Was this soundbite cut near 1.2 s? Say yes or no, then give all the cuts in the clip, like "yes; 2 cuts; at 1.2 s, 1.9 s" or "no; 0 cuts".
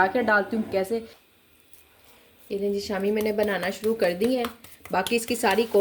yes; 1 cut; at 1.2 s